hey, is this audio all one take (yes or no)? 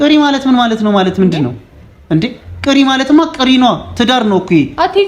yes